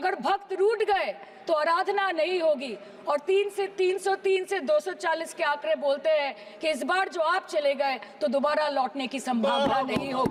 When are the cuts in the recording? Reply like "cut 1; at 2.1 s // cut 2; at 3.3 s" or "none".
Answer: none